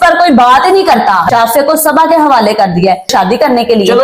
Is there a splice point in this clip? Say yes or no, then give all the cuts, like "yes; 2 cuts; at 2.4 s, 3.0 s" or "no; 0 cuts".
yes; 2 cuts; at 1.3 s, 3.1 s